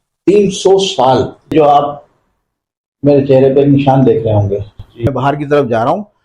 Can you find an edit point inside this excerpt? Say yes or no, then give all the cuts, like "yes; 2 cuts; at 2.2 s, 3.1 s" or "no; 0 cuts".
yes; 2 cuts; at 1.5 s, 5.1 s